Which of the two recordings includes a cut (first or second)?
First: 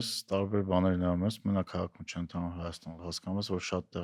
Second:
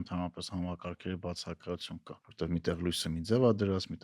second